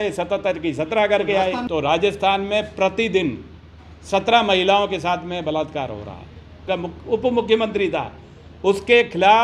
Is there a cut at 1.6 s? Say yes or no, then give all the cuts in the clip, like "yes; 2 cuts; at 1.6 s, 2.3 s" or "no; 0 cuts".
yes; 2 cuts; at 1.6 s, 6.6 s